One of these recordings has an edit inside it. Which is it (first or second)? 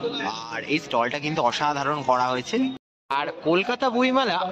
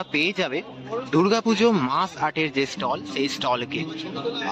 first